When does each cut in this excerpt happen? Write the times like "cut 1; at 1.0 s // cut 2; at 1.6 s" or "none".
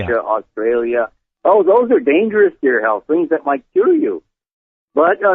cut 1; at 2.7 s